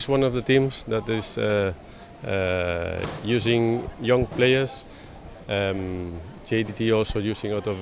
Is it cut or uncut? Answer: uncut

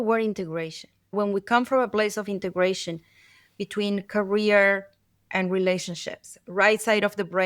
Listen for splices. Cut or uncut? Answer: cut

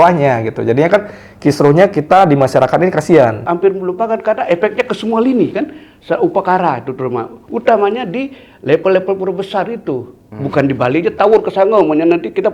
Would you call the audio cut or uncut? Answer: cut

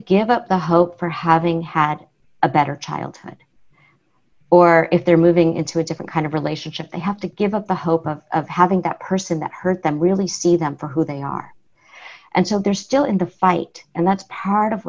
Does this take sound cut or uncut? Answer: uncut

